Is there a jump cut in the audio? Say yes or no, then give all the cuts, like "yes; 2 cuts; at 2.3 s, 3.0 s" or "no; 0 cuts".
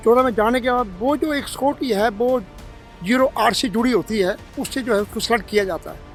no; 0 cuts